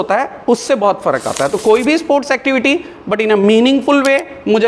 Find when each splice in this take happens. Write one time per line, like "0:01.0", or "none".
none